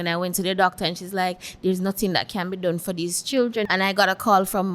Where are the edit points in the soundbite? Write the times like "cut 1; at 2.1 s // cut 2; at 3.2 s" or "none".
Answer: cut 1; at 3.6 s